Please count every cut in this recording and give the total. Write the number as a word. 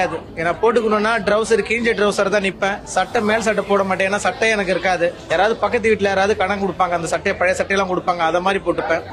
zero